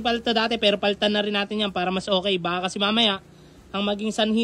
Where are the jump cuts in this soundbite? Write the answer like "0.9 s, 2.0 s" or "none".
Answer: none

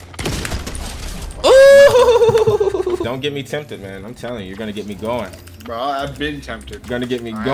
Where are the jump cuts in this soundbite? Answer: 3.0 s

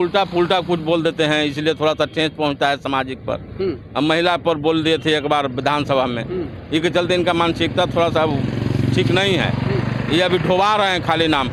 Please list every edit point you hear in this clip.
none

